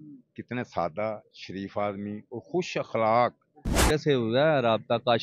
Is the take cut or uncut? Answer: cut